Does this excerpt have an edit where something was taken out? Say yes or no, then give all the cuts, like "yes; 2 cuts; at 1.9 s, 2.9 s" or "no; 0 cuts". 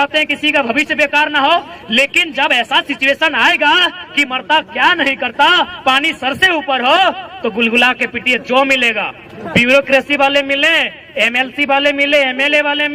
no; 0 cuts